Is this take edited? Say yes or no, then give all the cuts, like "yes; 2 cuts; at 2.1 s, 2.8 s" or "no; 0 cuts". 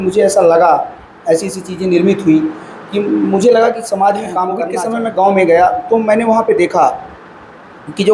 yes; 1 cut; at 4.7 s